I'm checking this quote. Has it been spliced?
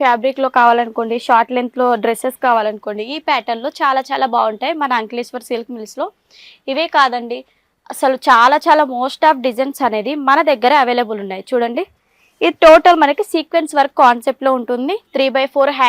no; 0 cuts

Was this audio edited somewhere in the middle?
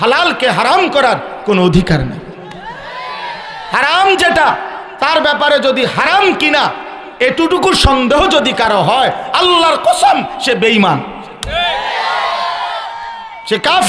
no; 0 cuts

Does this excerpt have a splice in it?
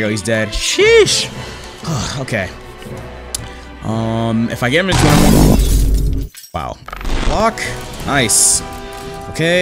yes; 1 cut; at 7.2 s

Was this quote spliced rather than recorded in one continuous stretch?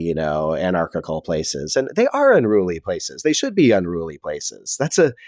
no; 0 cuts

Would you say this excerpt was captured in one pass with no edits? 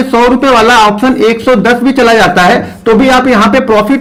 yes; 0 cuts

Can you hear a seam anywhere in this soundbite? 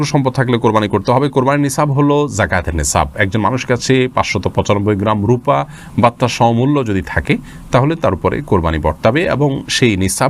no; 0 cuts

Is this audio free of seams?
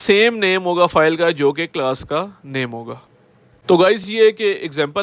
yes; 0 cuts

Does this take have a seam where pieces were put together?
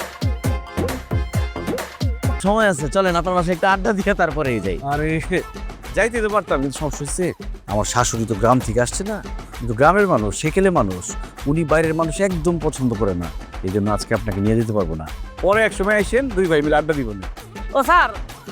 yes; 1 cut; at 2.4 s

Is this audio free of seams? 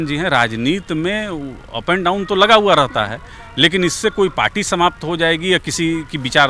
yes; 0 cuts

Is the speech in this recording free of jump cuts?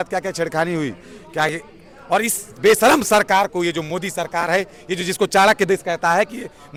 yes; 0 cuts

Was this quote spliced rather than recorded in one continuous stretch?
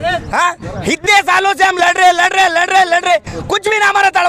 no; 0 cuts

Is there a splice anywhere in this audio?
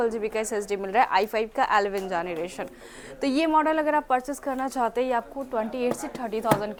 no; 0 cuts

